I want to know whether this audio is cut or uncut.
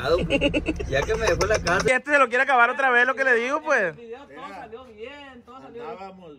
cut